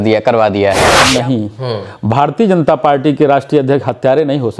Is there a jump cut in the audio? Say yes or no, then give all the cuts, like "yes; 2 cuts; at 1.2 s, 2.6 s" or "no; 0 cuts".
yes; 1 cut; at 1.0 s